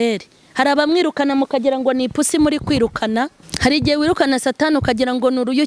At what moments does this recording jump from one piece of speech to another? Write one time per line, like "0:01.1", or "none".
0:03.5

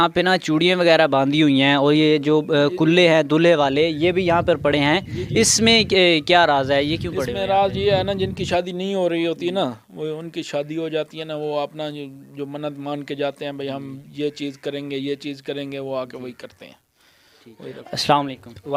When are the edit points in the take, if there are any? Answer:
none

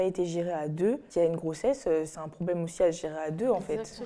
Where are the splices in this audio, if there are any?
0:01.1

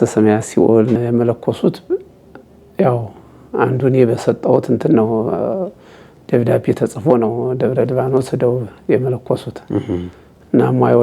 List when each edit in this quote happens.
0:01.0

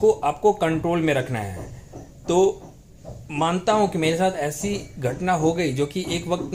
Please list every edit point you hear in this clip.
none

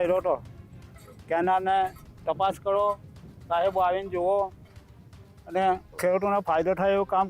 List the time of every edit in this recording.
0:05.9

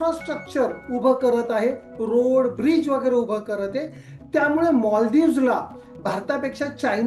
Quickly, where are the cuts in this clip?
none

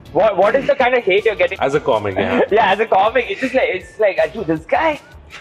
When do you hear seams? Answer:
0:01.5

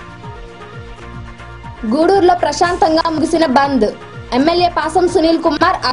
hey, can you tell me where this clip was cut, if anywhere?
0:01.0

